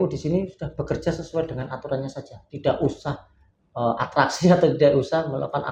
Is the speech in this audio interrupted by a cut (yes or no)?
no